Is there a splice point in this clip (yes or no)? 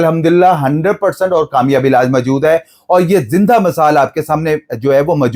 no